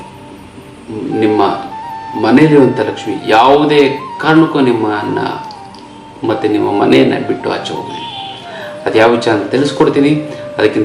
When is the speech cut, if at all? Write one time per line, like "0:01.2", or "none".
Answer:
none